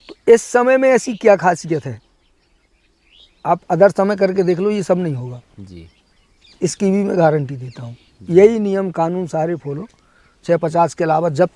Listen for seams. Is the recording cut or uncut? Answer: uncut